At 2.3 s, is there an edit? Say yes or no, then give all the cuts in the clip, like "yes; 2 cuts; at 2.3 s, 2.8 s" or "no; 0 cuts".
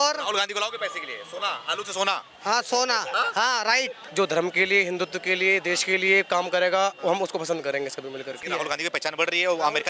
no; 2 cuts; at 4.0 s, 8.4 s